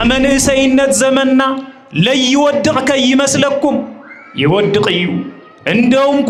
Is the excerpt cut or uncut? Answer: uncut